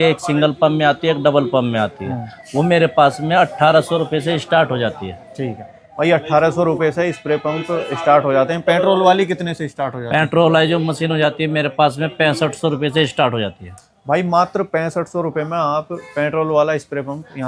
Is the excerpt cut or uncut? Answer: uncut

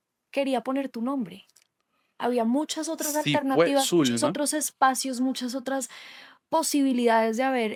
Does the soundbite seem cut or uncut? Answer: uncut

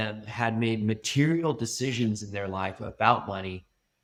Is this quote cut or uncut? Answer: uncut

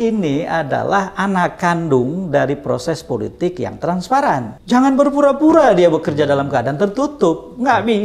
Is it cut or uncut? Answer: cut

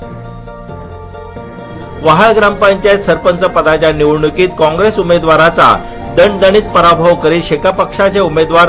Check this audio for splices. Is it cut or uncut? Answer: cut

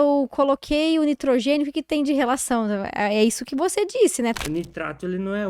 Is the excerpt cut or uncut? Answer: cut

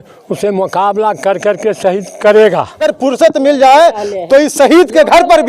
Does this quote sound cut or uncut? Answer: cut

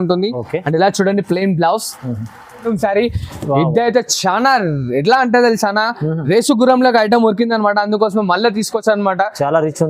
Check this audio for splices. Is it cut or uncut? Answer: cut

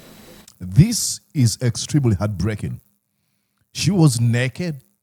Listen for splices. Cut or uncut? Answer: uncut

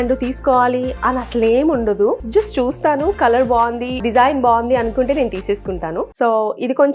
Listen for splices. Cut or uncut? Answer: cut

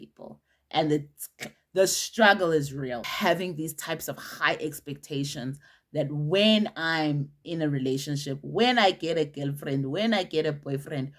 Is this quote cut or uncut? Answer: cut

